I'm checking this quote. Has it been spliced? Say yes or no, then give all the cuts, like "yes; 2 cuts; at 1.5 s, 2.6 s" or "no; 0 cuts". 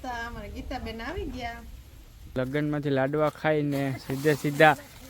yes; 1 cut; at 2.3 s